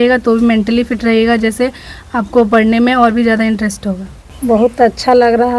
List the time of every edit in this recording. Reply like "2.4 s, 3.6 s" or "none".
4.6 s